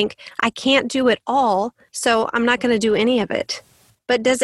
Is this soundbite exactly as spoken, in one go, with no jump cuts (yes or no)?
yes